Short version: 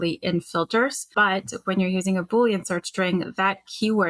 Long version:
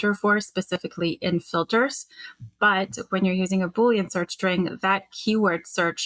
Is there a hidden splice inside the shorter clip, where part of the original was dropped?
yes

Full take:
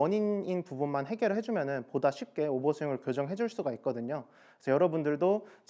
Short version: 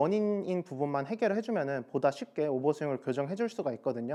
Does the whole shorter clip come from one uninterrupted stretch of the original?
yes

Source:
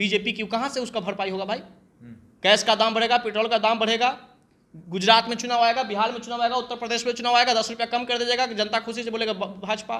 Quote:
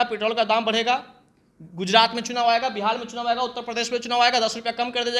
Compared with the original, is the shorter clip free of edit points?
yes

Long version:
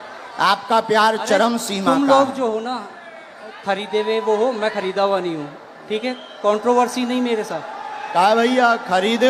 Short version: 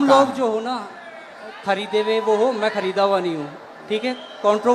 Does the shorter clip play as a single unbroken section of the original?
yes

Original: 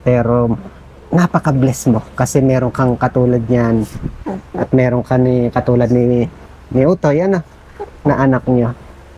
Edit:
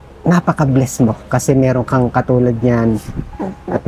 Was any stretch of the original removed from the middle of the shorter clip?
no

